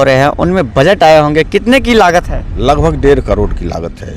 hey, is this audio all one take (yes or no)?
yes